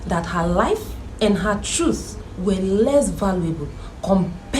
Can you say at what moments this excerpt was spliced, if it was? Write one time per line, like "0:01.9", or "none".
0:01.0

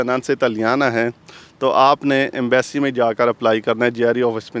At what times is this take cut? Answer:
none

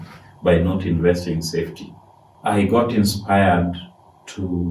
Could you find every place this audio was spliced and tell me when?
0:02.3

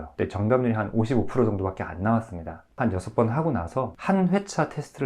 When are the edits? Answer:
0:02.8

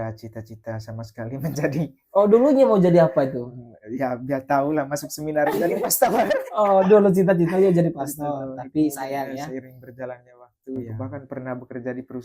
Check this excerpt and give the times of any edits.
0:10.9

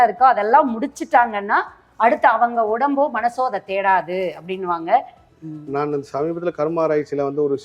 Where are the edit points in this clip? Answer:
0:05.2

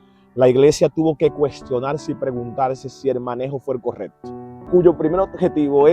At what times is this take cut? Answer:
0:04.6

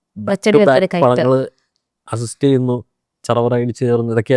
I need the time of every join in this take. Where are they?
none

